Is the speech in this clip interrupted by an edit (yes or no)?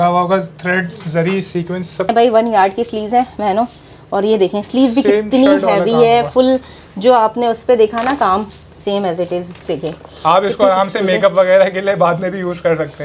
yes